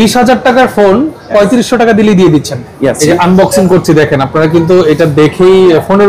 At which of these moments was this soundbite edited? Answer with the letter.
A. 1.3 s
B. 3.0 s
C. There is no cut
B